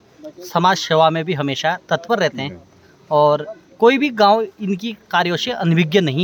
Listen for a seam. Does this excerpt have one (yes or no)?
no